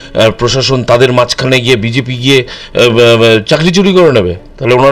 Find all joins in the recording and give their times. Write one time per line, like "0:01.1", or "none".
none